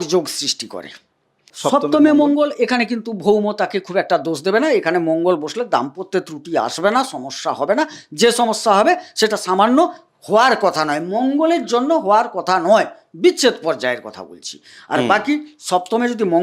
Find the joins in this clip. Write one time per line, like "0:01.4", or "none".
0:01.5